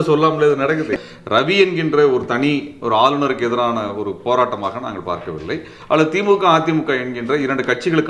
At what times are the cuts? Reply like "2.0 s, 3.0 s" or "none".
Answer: 0.9 s